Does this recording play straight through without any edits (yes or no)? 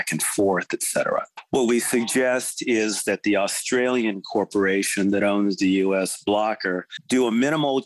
no